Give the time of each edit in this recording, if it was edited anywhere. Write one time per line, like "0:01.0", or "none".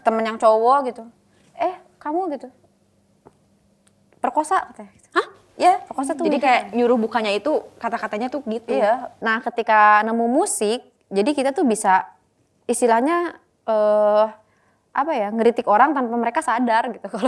0:09.1